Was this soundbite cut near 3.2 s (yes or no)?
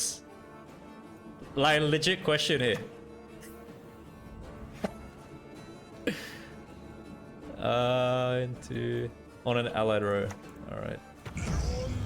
no